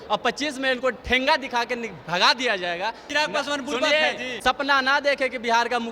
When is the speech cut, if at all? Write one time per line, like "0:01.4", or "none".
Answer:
0:03.1
0:04.6